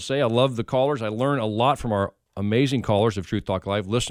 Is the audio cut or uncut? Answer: uncut